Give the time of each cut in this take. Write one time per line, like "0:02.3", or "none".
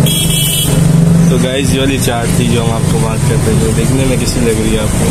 none